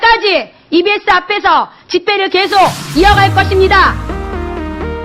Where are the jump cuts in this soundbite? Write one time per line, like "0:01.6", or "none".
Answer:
0:03.9